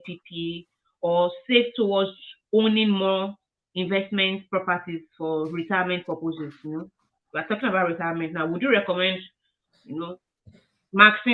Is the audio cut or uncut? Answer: uncut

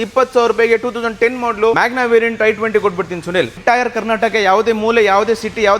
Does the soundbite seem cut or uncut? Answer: cut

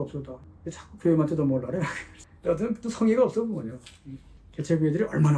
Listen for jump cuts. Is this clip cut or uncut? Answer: cut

